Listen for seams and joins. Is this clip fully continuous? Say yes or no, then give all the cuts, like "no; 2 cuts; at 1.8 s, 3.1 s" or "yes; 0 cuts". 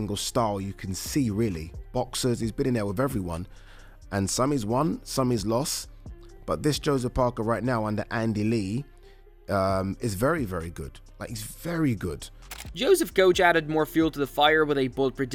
yes; 0 cuts